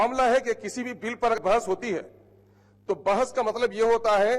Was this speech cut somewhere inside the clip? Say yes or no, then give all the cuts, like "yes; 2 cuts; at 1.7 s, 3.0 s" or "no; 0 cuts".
yes; 1 cut; at 1.4 s